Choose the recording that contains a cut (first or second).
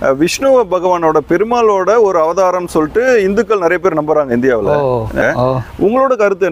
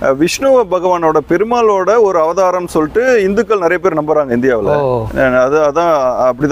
first